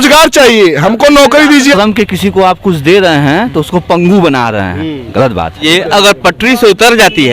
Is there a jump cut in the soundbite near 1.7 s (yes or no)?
yes